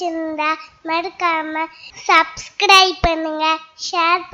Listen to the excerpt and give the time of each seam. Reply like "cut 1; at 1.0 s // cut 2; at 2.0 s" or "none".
none